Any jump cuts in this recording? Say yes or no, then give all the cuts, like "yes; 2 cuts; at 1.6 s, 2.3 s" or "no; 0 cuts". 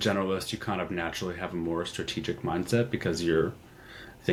no; 0 cuts